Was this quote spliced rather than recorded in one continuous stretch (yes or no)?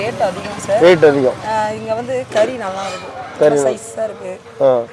no